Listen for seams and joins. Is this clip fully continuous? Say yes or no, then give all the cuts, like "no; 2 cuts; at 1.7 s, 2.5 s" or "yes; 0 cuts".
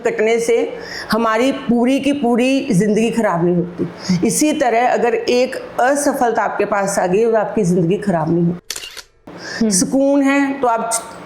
no; 1 cut; at 9.2 s